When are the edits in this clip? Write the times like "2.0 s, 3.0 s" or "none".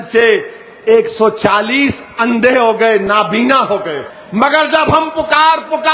4.1 s